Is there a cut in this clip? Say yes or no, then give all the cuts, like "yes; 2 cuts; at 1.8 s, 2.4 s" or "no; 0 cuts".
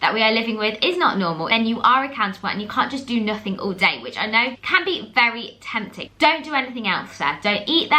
yes; 3 cuts; at 1.4 s, 4.6 s, 6.0 s